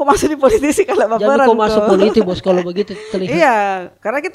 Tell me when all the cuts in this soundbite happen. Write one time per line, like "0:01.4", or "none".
none